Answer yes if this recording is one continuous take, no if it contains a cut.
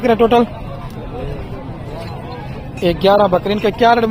yes